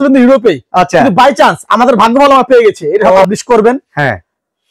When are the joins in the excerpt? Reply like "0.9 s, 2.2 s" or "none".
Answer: 3.2 s